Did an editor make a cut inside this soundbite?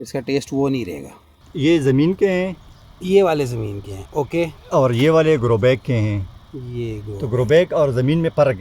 yes; 1 cut; at 1.4 s

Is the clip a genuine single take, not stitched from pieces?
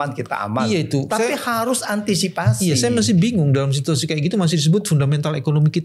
yes; 0 cuts

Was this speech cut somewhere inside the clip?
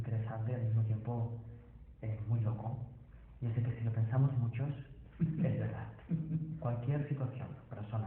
yes; 1 cut; at 6.6 s

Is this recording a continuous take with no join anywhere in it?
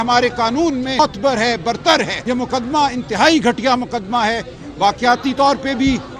no; 2 cuts; at 1.0 s, 2.2 s

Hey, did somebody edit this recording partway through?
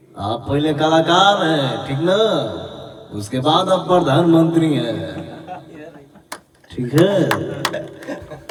no; 0 cuts

